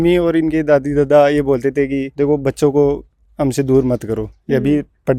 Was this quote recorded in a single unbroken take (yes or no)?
yes